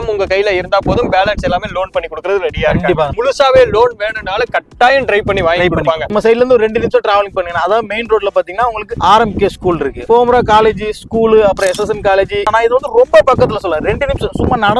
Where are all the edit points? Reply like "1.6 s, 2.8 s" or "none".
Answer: 3.1 s, 6.0 s, 10.0 s, 12.4 s